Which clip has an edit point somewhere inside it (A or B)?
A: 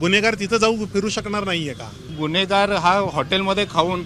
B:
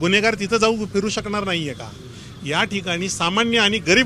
A